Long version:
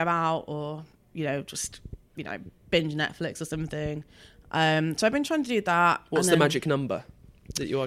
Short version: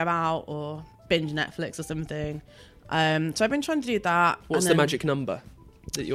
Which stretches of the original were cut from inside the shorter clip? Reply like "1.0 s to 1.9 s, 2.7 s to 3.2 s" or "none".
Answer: 0.9 s to 2.5 s